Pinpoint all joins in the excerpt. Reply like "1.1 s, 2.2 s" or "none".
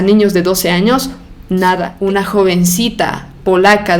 1.9 s